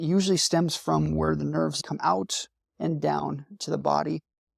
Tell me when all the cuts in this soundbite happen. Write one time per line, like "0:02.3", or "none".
0:01.8